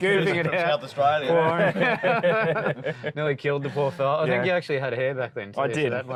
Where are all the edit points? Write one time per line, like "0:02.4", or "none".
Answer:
none

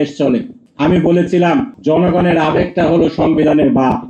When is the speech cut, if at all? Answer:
0:01.7

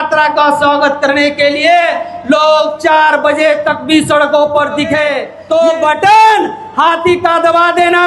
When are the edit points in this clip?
0:05.3

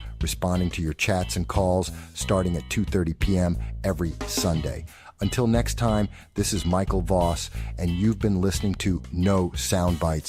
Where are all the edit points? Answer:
0:05.3

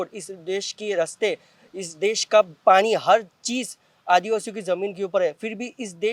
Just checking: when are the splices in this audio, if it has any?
none

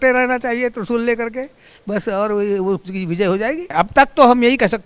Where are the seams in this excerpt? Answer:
0:03.7

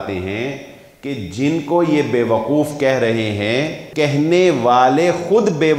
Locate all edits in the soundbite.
0:03.8

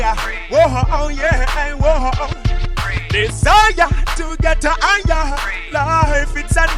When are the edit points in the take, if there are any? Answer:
none

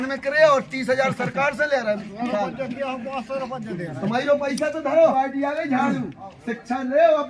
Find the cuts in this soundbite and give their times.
0:05.1

